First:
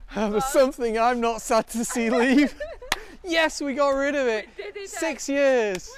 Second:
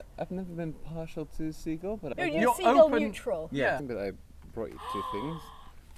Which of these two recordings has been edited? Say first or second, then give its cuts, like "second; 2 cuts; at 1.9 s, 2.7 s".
second; 2 cuts; at 2.1 s, 3.8 s